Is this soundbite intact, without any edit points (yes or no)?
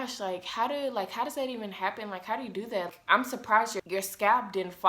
no